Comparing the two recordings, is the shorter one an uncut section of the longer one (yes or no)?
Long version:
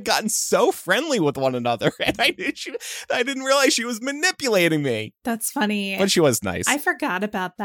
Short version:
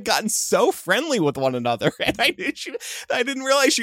yes